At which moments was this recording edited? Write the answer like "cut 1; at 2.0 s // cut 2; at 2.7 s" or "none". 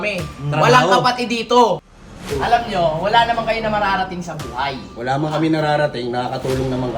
cut 1; at 1.8 s